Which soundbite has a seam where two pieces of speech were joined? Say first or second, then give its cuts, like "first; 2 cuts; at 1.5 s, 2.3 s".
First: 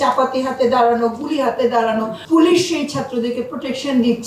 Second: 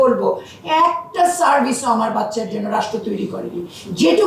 first; 1 cut; at 2.2 s